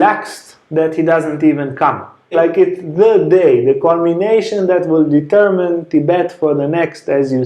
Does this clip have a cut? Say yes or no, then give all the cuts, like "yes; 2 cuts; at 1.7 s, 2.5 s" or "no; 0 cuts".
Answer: yes; 1 cut; at 2.3 s